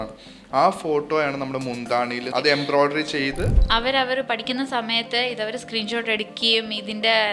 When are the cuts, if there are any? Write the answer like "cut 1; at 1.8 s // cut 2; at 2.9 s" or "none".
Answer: cut 1; at 2.3 s // cut 2; at 3.6 s